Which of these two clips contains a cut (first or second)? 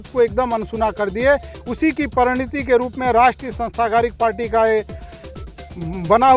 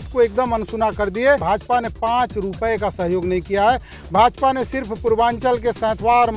second